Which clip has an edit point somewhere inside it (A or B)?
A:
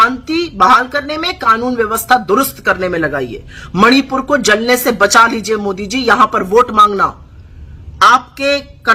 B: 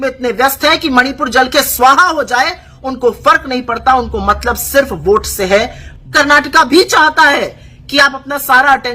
B